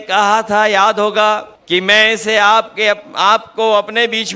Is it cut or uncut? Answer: cut